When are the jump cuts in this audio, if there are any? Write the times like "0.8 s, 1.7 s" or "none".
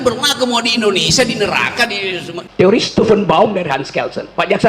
2.4 s